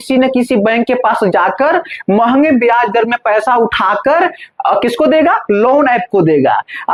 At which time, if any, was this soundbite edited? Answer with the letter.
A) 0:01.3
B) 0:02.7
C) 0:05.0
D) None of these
D